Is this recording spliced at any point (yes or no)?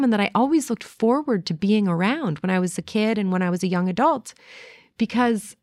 no